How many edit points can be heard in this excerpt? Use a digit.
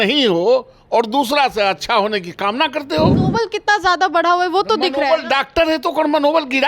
1